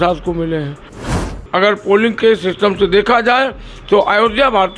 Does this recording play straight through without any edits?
no; 1 cut; at 1.4 s

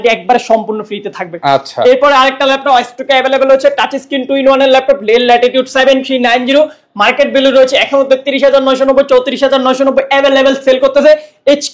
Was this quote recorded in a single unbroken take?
yes; 0 cuts

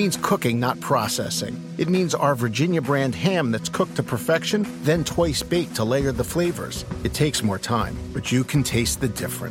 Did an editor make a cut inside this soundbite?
no; 0 cuts

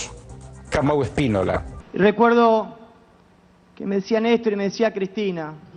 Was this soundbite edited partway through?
no; 0 cuts

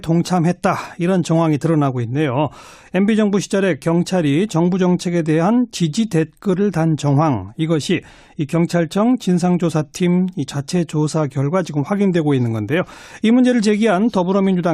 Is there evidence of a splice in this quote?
no; 0 cuts

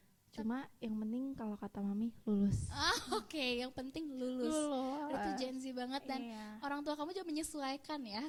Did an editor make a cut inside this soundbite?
no; 0 cuts

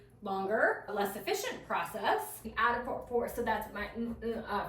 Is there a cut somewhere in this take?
yes; 1 cut; at 2.4 s

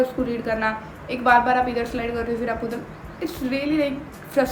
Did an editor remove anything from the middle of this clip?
no; 0 cuts

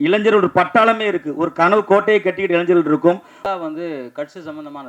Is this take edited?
yes; 1 cut; at 3.3 s

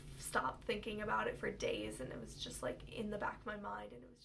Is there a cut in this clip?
no; 0 cuts

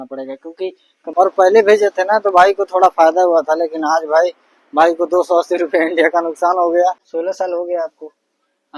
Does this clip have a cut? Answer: yes; 2 cuts; at 0.9 s, 7.1 s

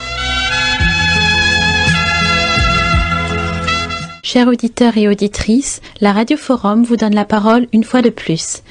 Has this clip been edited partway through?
no; 0 cuts

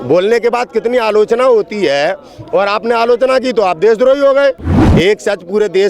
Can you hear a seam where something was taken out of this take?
yes; 1 cut; at 4.8 s

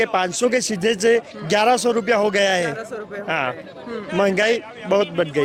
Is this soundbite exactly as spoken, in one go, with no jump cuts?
yes; 0 cuts

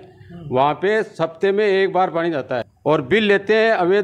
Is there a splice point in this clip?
yes; 1 cut; at 2.7 s

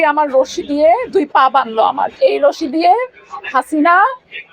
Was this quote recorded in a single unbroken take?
no; 1 cut; at 2.1 s

